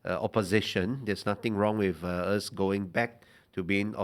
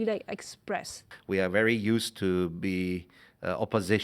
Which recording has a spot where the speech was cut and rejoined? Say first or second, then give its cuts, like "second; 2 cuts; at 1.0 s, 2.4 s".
second; 1 cut; at 1.1 s